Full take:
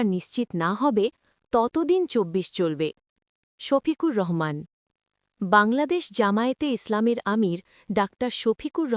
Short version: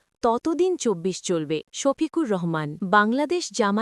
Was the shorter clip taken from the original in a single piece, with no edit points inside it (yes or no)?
no